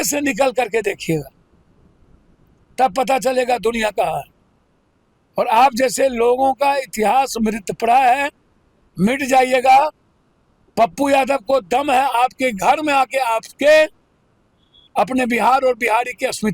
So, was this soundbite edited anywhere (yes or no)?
no